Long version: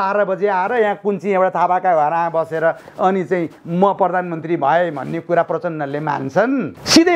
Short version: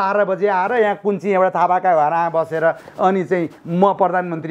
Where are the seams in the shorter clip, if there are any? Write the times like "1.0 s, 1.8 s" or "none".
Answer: none